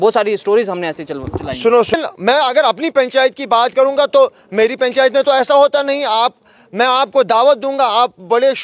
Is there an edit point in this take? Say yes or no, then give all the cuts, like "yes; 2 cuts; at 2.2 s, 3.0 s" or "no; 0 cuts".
yes; 1 cut; at 1.9 s